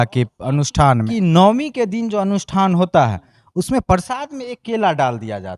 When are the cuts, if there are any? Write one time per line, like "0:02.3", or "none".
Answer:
0:01.1